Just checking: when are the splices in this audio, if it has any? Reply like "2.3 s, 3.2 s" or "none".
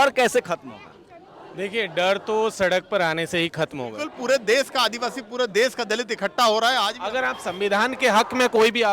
4.1 s, 7.0 s